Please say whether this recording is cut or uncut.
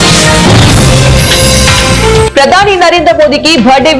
cut